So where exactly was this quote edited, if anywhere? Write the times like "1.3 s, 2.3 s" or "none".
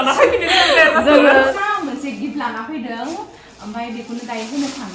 1.5 s